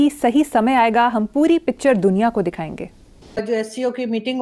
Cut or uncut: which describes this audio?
cut